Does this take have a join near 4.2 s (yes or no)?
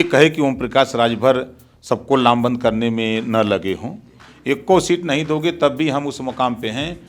yes